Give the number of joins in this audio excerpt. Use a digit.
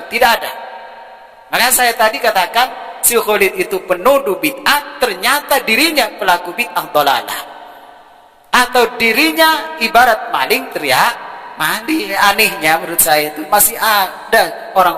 1